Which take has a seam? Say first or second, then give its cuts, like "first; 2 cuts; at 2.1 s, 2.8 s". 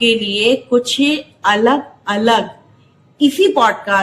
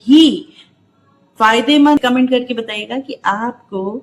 second; 1 cut; at 2.0 s